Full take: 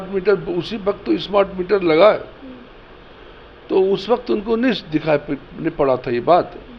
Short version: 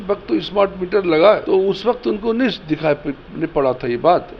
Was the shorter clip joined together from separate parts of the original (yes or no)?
yes